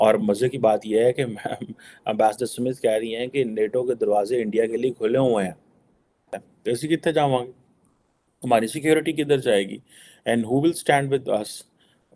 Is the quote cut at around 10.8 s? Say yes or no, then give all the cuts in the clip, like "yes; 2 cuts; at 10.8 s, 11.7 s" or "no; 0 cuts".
no; 1 cut; at 6.2 s